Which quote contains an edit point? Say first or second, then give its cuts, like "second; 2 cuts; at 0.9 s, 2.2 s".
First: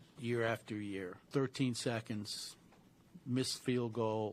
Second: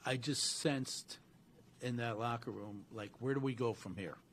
first; 1 cut; at 1.2 s